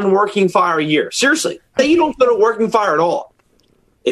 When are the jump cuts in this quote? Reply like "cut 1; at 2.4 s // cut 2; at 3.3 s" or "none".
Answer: cut 1; at 1.8 s